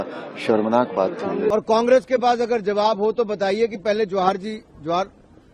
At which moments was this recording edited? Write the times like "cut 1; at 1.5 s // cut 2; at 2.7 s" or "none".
cut 1; at 1.5 s